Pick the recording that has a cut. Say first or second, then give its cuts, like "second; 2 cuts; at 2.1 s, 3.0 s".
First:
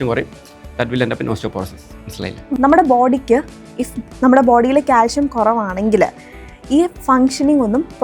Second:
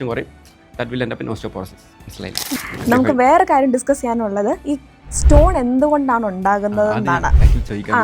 first; 1 cut; at 2.5 s